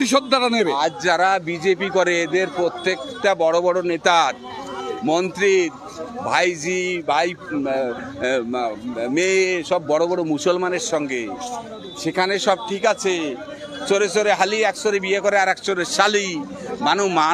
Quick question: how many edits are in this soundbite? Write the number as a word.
zero